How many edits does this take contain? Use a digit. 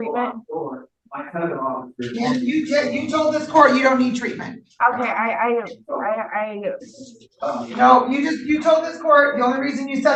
0